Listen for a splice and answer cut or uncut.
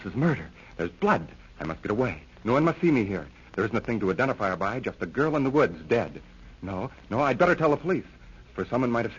cut